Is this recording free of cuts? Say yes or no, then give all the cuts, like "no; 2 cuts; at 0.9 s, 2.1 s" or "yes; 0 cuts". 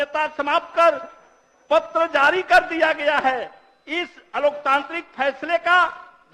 yes; 0 cuts